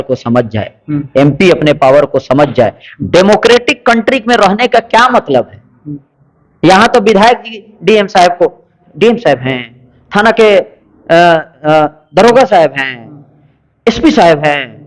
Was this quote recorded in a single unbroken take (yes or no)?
yes